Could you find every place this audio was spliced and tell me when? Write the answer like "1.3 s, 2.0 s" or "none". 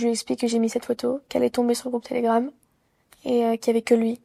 none